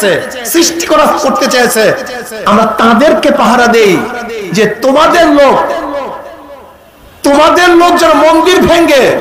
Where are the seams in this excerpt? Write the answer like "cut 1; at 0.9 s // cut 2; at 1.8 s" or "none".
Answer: none

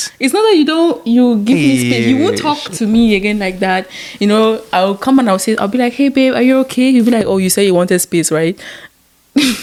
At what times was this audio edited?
none

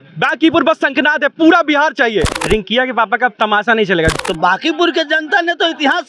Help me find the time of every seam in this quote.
cut 1; at 2.3 s // cut 2; at 4.1 s

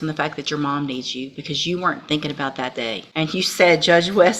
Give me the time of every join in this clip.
cut 1; at 3.0 s

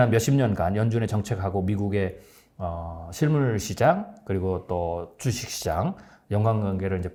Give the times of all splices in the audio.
none

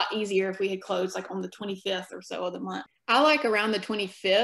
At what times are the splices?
cut 1; at 2.9 s

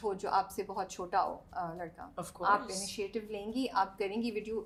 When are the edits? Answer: none

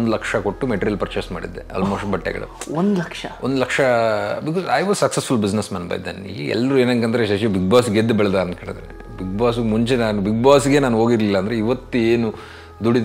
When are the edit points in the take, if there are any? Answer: none

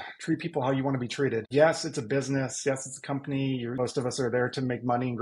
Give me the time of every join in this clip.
cut 1; at 1.5 s // cut 2; at 3.8 s

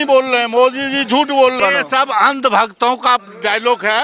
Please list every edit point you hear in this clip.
cut 1; at 1.6 s

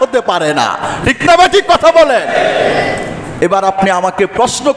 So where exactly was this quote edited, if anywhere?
none

